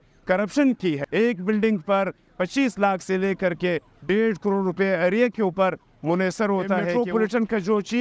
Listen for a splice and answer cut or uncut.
cut